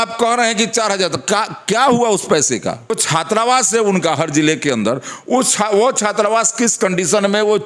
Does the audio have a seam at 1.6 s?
no; 1 cut; at 2.9 s

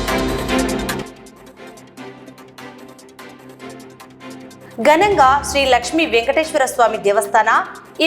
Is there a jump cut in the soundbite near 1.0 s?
yes; 2 cuts; at 1.0 s, 4.5 s

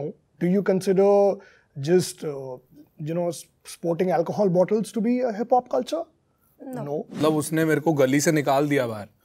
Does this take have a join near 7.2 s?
yes; 1 cut; at 7.2 s

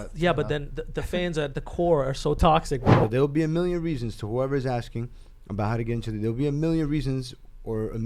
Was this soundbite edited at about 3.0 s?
yes; 1 cut; at 3.0 s

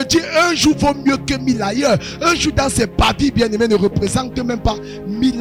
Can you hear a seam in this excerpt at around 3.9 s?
no; 0 cuts

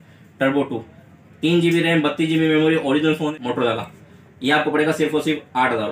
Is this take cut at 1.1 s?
no; 1 cut; at 3.3 s

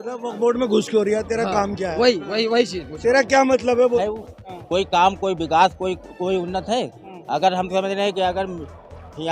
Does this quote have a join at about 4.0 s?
yes; 1 cut; at 4.0 s

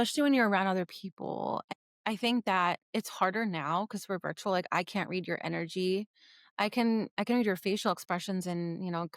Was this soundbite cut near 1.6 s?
yes; 1 cut; at 1.6 s

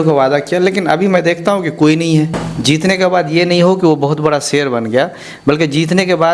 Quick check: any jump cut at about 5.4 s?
no; 1 cut; at 2.4 s

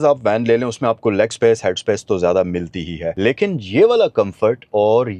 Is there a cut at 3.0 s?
yes; 1 cut; at 3.0 s

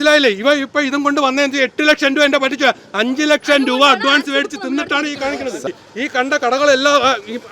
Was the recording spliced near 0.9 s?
no; 1 cut; at 5.6 s

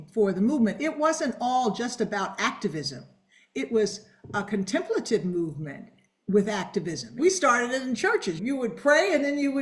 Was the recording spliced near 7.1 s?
yes; 1 cut; at 7.1 s

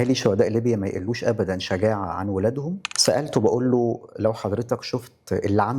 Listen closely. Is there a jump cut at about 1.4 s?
no; 1 cut; at 2.9 s

